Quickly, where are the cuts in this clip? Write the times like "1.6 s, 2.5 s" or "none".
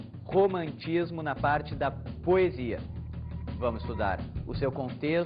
4.2 s